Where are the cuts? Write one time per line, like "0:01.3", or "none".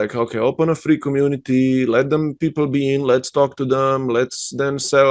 none

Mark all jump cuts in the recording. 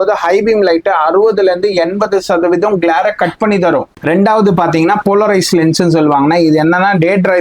0:04.0

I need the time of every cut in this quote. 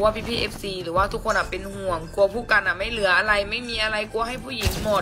none

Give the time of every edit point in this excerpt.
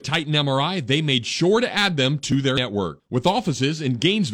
0:02.5

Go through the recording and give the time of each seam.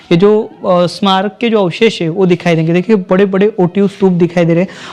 none

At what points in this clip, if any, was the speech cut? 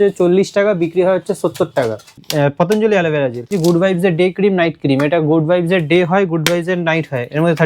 0:02.2
0:03.5

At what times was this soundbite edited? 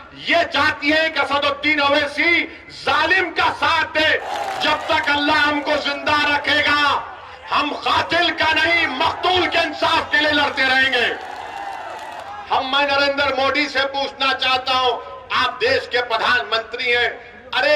0:04.3
0:12.2

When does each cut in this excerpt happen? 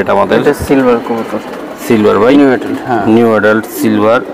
none

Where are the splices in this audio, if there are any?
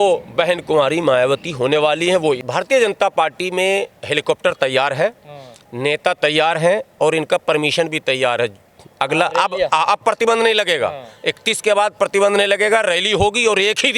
0:02.4

